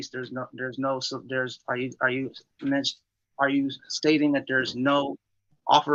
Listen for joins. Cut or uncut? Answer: uncut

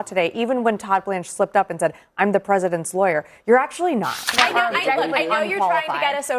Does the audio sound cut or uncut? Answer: cut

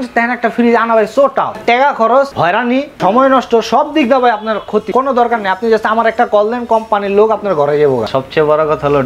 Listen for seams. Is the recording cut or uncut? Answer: cut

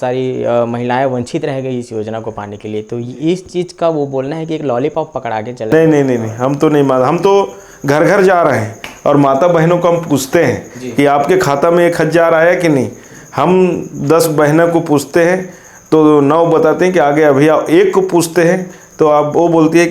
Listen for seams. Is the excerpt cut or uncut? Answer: uncut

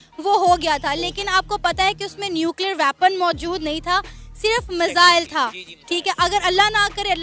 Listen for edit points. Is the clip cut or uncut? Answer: uncut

